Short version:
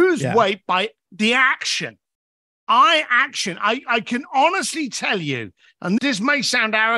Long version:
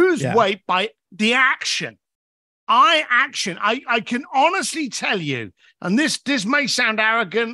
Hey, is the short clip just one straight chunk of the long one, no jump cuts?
no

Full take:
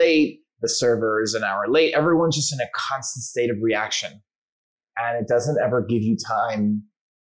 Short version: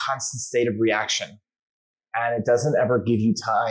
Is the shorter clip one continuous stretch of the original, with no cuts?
yes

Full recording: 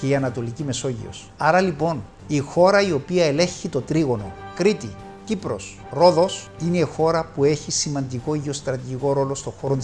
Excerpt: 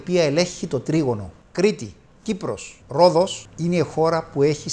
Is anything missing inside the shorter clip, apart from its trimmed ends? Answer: no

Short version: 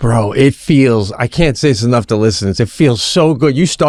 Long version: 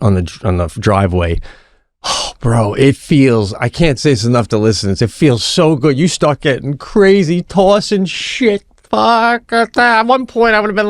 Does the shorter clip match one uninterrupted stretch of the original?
yes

